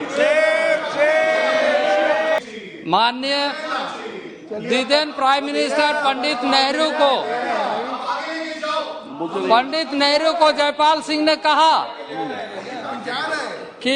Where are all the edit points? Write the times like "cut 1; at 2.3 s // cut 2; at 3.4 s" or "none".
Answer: cut 1; at 2.4 s